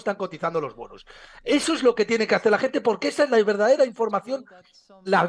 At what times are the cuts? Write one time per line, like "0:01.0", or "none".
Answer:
none